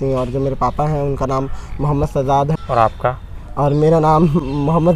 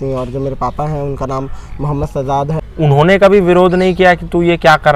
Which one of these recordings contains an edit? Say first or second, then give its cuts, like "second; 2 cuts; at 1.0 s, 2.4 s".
second; 1 cut; at 2.6 s